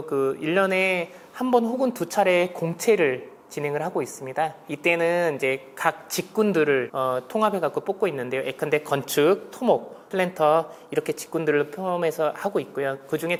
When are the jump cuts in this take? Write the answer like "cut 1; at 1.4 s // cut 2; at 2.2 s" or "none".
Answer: none